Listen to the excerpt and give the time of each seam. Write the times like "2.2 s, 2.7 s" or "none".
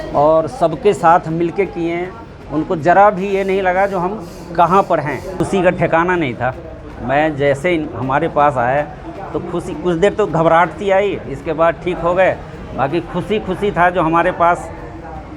5.4 s